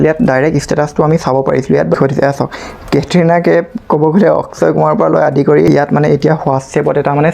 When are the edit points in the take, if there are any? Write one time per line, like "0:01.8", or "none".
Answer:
0:01.9
0:05.7